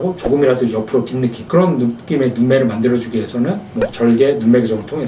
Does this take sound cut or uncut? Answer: cut